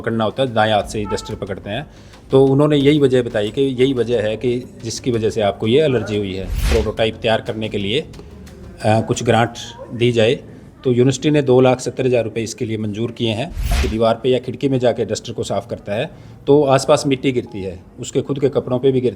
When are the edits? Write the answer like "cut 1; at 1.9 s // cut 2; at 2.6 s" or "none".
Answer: cut 1; at 6.7 s // cut 2; at 13.8 s